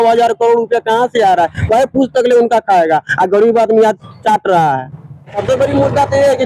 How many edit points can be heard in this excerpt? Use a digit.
1